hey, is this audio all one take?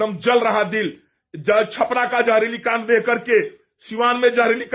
yes; 0 cuts

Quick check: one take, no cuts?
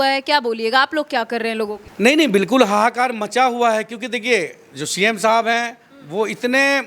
no; 1 cut; at 1.8 s

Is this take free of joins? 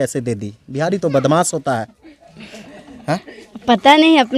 yes; 0 cuts

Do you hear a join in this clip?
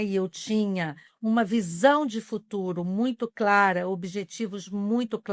no; 0 cuts

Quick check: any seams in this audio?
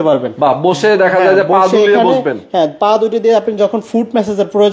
no; 0 cuts

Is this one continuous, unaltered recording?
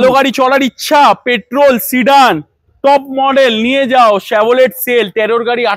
yes; 0 cuts

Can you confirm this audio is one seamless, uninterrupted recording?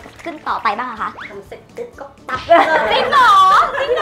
yes; 0 cuts

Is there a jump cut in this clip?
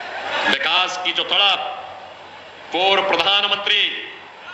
no; 0 cuts

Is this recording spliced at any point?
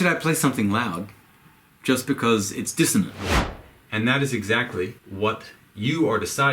yes; 2 cuts; at 3.3 s, 5.0 s

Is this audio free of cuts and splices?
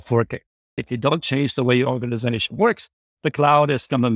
yes; 0 cuts

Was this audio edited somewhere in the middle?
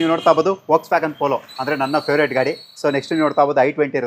no; 0 cuts

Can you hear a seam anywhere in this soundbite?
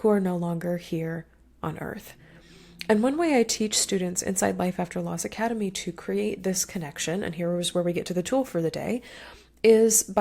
no; 0 cuts

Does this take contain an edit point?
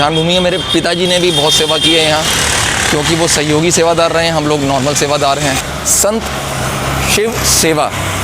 yes; 1 cut; at 5.7 s

